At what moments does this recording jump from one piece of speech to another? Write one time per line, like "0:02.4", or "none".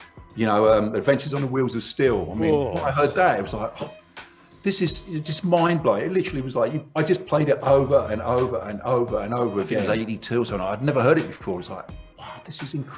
0:09.8